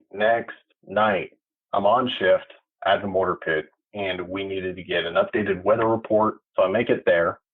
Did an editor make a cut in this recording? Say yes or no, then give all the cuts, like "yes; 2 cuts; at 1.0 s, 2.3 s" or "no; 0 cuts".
yes; 2 cuts; at 1.5 s, 6.4 s